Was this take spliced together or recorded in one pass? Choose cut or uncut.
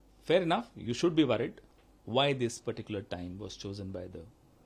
cut